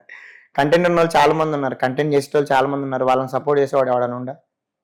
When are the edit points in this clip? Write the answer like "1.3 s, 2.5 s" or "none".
none